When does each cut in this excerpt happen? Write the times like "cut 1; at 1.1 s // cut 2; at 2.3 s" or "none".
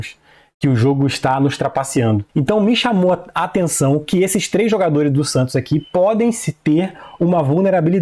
cut 1; at 2.3 s